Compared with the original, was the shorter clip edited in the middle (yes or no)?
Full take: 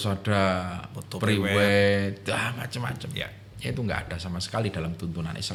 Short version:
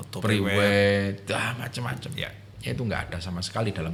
no